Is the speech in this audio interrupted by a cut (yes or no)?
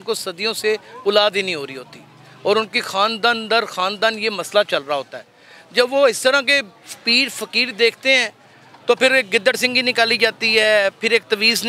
no